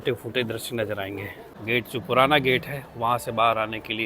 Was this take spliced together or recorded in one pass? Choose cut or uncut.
cut